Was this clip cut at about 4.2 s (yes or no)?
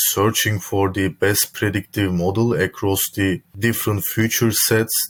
no